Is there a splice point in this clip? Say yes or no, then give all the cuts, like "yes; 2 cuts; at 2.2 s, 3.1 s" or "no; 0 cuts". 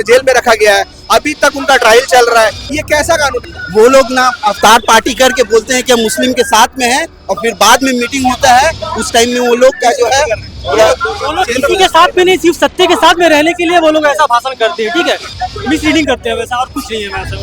yes; 1 cut; at 3.4 s